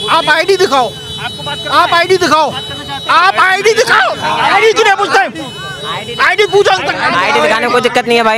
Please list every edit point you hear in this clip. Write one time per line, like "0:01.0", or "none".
none